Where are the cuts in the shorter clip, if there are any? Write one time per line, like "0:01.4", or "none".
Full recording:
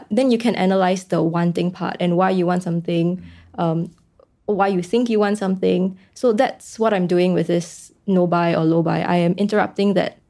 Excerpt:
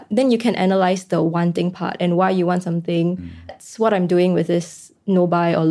0:03.5